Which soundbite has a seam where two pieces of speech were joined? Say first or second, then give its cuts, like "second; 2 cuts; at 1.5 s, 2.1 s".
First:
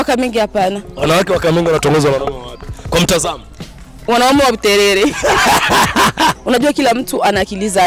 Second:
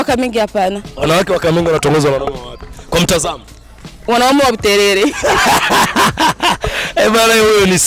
first; 1 cut; at 6.4 s